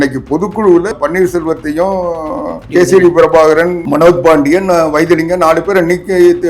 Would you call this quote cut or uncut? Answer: cut